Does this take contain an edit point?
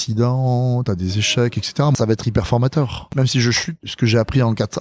yes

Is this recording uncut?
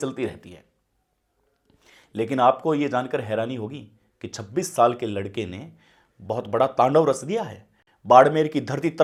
yes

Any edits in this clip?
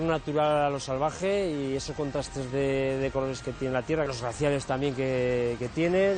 yes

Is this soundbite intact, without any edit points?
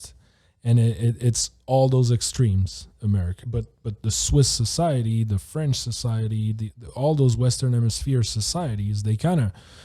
no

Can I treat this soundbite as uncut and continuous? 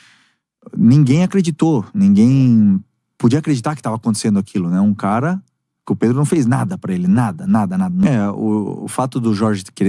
no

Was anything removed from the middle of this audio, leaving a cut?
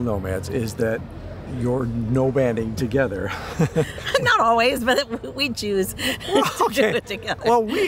no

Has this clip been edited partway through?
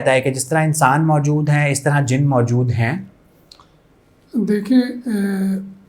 no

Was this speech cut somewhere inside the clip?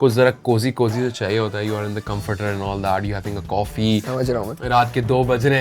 no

